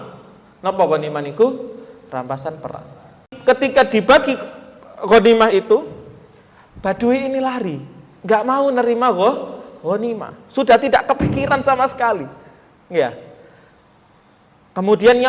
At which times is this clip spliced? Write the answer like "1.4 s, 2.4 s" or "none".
3.4 s